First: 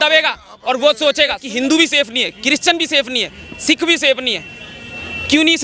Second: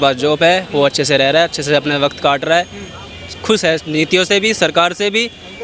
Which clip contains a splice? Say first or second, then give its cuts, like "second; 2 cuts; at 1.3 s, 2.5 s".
first; 1 cut; at 1.5 s